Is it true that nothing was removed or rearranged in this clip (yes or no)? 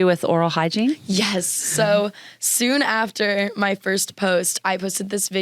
yes